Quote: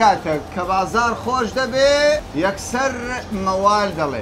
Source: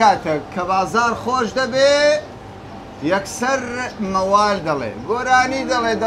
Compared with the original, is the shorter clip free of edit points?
no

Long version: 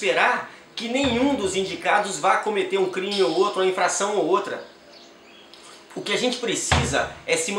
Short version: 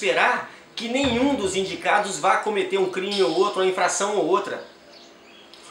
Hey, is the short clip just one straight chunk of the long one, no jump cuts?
yes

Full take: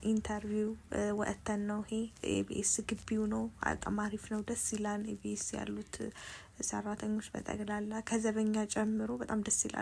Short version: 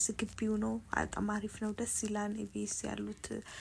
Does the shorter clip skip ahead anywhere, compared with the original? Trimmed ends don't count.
no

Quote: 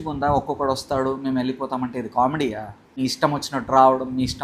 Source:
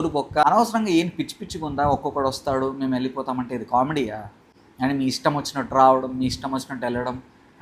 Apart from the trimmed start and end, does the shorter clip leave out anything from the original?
yes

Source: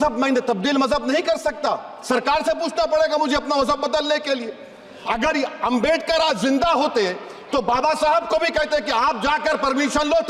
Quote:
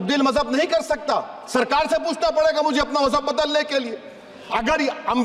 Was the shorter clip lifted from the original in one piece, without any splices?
yes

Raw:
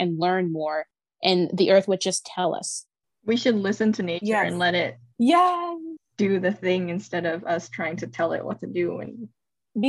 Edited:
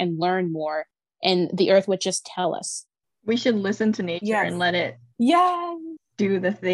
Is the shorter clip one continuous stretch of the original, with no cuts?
yes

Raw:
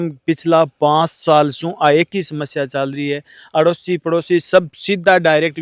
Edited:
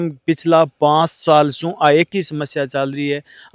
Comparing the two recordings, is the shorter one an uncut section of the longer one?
yes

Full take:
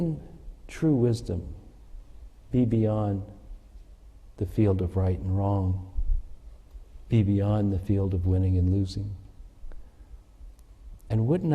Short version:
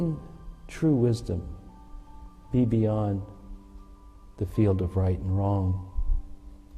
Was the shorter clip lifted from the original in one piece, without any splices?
yes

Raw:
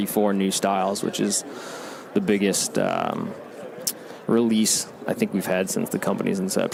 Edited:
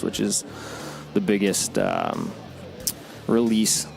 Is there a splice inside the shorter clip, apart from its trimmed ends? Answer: no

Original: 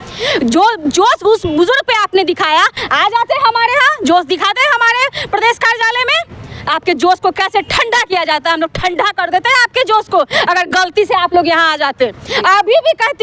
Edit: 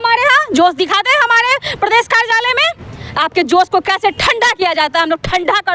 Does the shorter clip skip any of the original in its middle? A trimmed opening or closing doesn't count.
no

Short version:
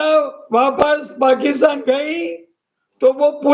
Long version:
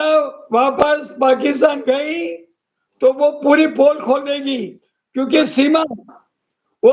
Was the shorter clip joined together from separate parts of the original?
no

